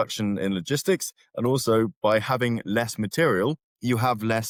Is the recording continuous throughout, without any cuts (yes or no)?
yes